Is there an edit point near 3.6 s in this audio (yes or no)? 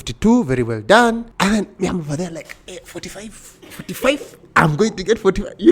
no